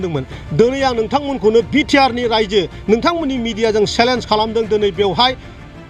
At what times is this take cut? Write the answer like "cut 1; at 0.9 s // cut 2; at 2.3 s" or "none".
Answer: none